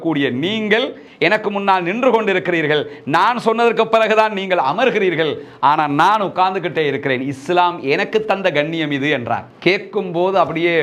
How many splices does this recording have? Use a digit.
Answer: 0